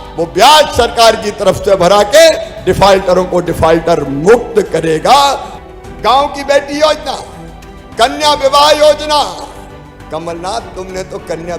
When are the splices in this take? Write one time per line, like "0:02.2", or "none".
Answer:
0:05.5

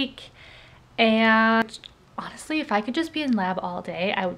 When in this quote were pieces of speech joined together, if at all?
0:01.6

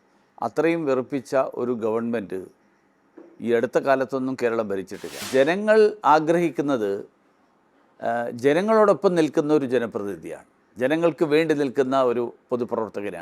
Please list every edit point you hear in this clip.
0:05.2

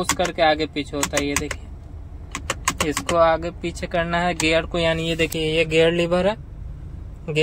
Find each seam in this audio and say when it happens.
none

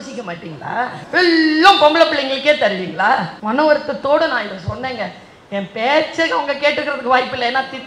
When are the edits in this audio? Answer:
0:01.0
0:03.3

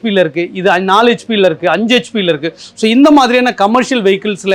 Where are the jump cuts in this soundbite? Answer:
none

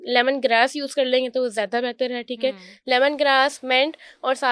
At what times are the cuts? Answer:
none

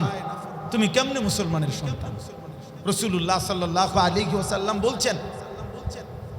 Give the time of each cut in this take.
0:02.7

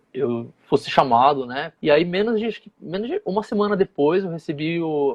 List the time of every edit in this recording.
0:01.7

